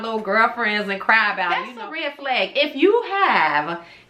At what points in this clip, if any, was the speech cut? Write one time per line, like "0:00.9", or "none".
0:01.7